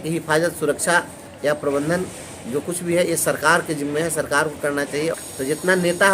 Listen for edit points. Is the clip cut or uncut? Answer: cut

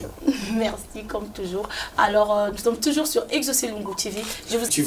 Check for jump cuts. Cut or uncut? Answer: uncut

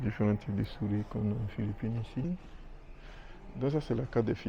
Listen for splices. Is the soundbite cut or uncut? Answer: cut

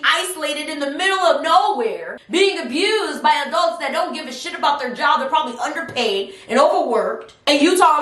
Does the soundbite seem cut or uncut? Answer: cut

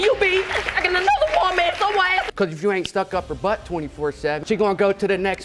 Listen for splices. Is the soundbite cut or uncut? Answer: cut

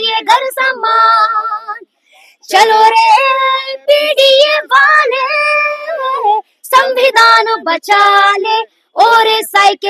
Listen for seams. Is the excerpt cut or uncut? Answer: uncut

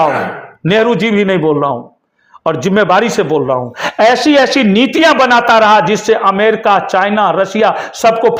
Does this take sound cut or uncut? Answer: uncut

